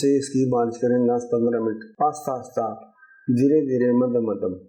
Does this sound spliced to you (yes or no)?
yes